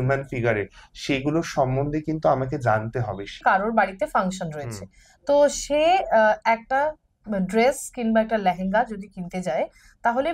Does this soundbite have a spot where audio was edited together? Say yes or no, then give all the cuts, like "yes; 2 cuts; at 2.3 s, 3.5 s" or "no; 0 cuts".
yes; 1 cut; at 3.4 s